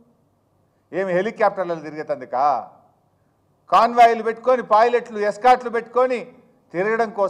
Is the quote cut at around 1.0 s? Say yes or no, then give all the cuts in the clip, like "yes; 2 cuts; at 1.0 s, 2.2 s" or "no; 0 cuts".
no; 1 cut; at 5.6 s